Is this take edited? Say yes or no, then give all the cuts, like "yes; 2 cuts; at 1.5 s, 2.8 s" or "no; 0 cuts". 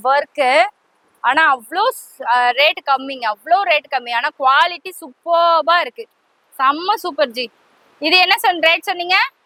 no; 0 cuts